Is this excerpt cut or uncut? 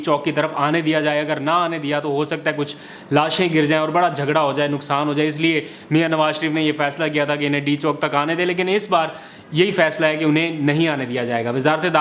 uncut